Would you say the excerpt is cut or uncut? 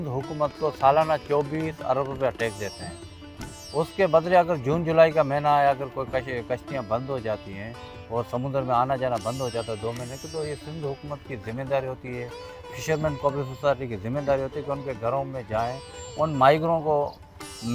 uncut